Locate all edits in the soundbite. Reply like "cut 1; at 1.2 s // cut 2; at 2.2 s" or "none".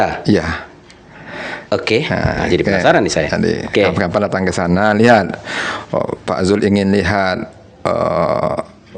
none